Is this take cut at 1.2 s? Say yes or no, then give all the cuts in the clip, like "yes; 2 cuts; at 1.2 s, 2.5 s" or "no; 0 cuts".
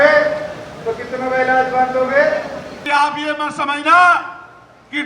no; 1 cut; at 2.7 s